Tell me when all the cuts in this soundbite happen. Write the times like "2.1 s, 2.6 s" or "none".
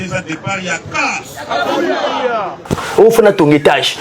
2.5 s